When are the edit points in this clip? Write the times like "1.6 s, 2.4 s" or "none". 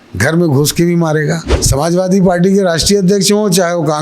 1.5 s